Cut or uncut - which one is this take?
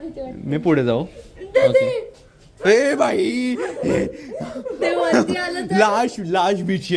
uncut